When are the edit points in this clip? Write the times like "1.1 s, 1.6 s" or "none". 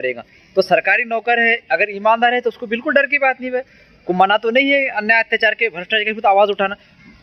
none